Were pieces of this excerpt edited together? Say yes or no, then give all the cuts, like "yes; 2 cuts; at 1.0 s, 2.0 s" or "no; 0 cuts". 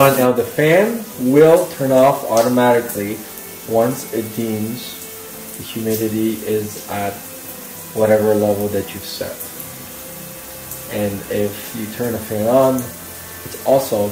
no; 0 cuts